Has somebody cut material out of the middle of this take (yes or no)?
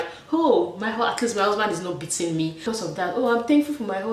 yes